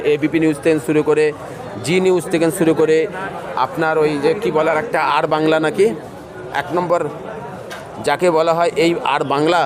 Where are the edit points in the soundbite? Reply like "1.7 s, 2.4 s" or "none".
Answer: none